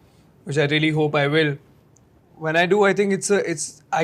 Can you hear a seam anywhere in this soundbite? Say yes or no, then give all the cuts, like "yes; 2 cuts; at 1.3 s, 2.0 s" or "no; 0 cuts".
no; 0 cuts